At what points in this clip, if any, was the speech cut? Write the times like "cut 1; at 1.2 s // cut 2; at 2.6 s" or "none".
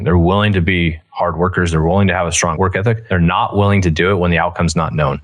cut 1; at 2.6 s